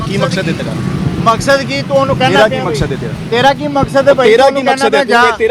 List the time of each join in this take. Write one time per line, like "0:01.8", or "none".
none

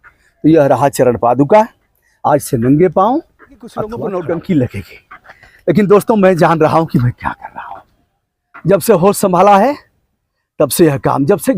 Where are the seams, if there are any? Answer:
0:03.9

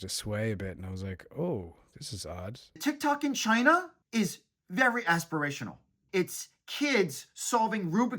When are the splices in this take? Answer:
0:02.7
0:04.0
0:06.0

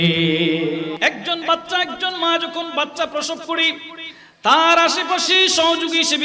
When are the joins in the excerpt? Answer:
0:01.0

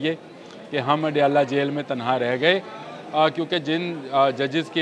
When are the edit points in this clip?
none

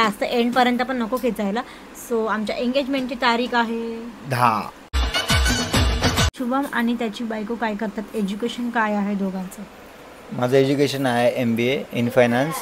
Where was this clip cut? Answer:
0:04.8
0:06.3

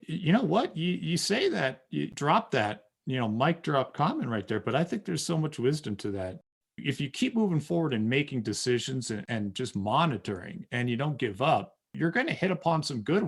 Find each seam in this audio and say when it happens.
0:02.1
0:06.4
0:11.9

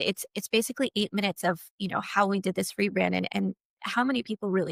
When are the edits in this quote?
none

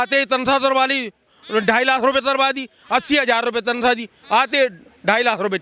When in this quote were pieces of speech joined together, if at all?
none

